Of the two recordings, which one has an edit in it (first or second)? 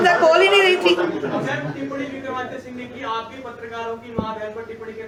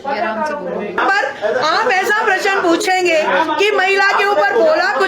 second